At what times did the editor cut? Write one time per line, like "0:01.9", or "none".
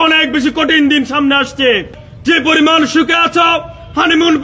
0:01.9